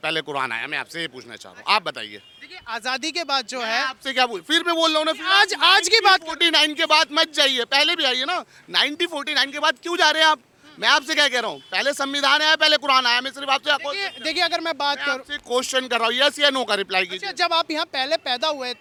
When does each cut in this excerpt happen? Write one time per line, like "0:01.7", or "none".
none